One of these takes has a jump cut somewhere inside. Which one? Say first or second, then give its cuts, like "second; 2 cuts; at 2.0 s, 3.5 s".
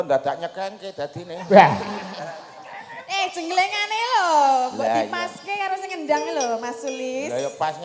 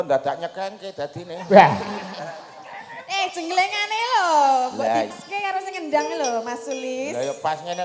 second; 1 cut; at 5.2 s